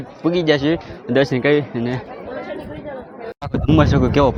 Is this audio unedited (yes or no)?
yes